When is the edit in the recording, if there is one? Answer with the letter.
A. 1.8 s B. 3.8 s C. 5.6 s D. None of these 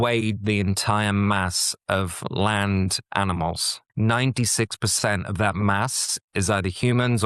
B